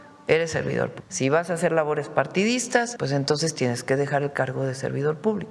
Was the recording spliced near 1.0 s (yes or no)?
yes